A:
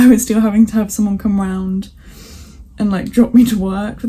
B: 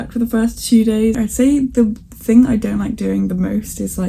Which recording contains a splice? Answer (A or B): B